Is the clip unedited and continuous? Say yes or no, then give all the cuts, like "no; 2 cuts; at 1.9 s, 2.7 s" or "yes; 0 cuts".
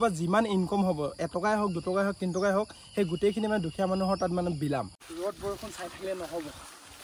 no; 1 cut; at 5.0 s